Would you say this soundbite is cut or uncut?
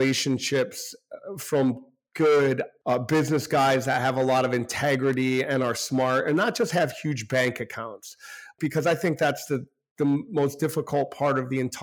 uncut